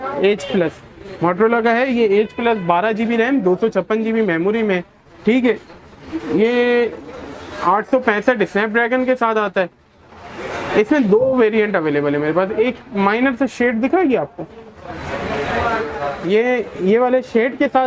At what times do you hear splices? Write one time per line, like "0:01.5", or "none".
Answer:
none